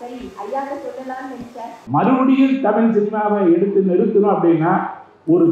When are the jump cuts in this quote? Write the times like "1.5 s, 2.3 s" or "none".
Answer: 1.8 s